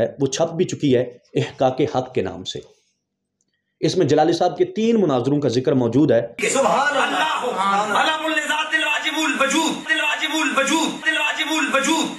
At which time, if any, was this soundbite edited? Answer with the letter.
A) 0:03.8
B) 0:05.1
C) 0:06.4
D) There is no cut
C